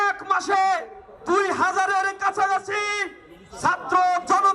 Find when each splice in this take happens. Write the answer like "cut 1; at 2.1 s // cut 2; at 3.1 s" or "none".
none